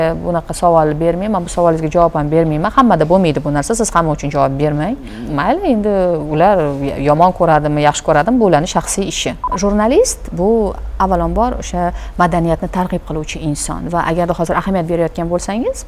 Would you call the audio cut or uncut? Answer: cut